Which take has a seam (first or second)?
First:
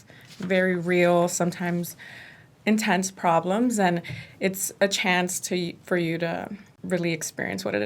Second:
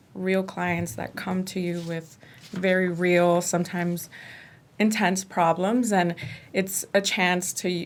first